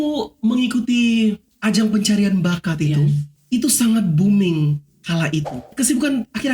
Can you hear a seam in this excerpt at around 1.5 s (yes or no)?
yes